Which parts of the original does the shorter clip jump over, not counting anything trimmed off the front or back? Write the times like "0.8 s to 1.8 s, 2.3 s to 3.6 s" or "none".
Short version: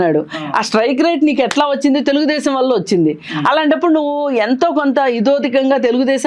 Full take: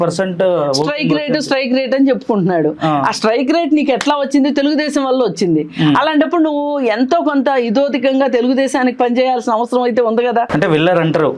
none

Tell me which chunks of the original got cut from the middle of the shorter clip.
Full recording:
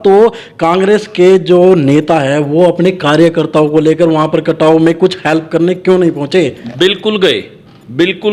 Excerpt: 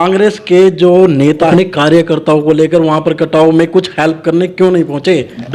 2.2 s to 2.8 s

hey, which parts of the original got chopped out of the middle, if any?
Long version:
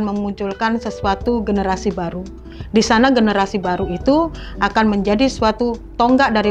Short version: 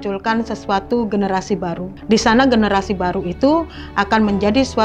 2.2 s to 2.5 s

